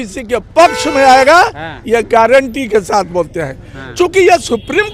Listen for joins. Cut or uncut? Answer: uncut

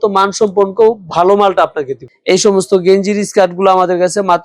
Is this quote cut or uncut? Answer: cut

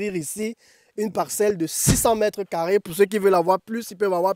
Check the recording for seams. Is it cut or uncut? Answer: uncut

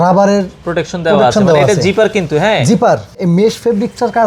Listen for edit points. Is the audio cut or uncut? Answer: cut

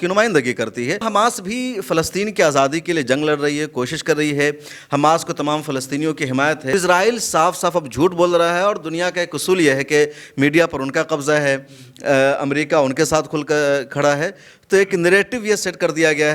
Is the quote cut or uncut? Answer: cut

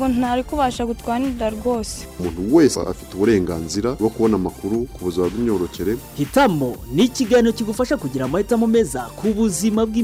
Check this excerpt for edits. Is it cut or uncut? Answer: uncut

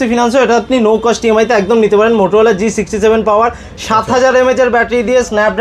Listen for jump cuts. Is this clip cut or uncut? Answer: uncut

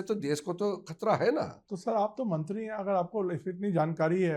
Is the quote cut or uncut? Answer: uncut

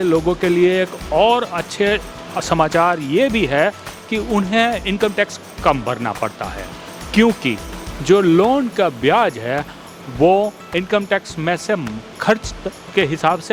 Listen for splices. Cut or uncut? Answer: uncut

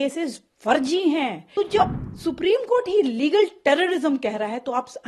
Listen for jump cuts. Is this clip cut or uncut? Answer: cut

